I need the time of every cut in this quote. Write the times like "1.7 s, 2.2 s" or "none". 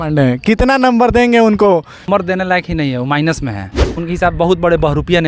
2.1 s, 3.9 s